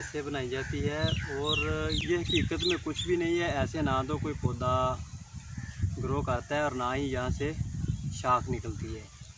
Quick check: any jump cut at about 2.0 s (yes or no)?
yes